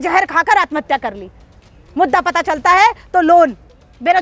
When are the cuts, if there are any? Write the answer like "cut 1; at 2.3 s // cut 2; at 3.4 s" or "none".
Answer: none